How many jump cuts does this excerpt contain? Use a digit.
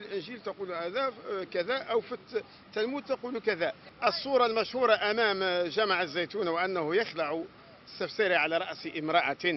1